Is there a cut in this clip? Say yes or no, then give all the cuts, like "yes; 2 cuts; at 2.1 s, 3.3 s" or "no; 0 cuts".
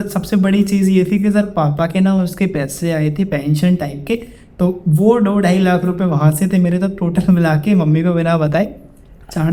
no; 0 cuts